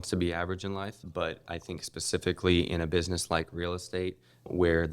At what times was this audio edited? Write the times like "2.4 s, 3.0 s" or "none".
1.0 s

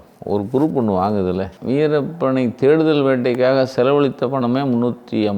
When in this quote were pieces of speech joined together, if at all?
1.5 s

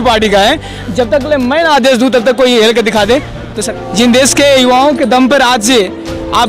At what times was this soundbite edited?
3.6 s

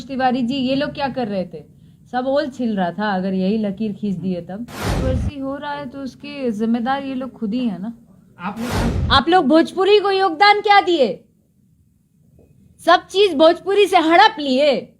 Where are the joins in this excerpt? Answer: 5.0 s, 8.9 s

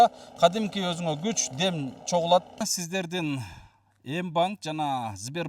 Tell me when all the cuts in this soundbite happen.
2.7 s

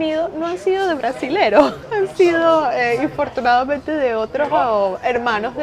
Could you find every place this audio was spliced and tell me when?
1.7 s

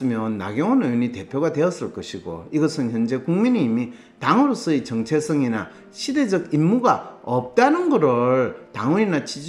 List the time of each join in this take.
none

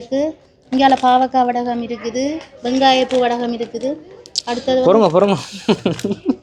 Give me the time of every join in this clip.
none

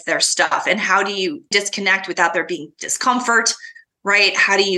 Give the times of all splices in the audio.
1.5 s

